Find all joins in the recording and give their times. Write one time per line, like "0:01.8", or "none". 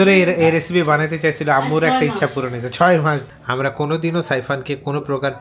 0:03.3